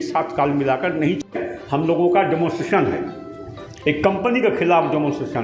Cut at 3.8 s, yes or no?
no